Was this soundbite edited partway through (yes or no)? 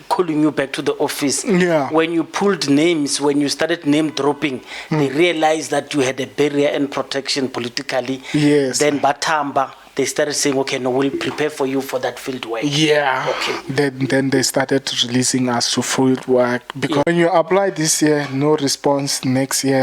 yes